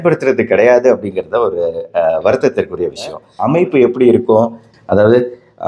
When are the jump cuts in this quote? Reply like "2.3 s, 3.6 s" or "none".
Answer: 3.3 s

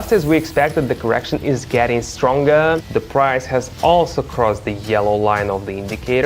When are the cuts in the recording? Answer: 2.8 s

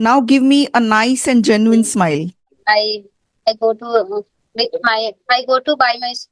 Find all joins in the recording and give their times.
2.5 s

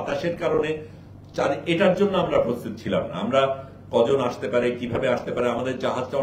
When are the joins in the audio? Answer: none

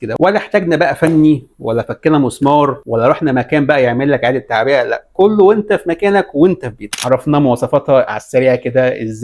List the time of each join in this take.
2.8 s, 6.9 s

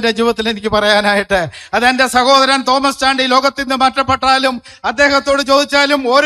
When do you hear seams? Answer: none

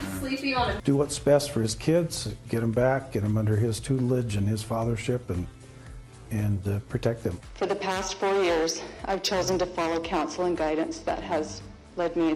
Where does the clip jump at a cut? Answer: 0.8 s, 7.4 s

